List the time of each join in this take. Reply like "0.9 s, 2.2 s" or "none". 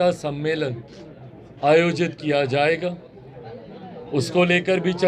none